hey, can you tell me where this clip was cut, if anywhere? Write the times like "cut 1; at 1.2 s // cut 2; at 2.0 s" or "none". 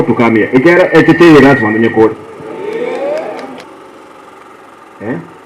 cut 1; at 3.6 s